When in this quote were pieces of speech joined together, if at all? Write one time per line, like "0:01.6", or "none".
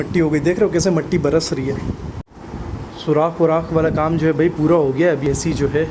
0:02.2